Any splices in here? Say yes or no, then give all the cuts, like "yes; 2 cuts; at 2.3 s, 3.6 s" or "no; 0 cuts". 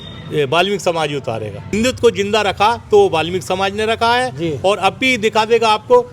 yes; 1 cut; at 1.6 s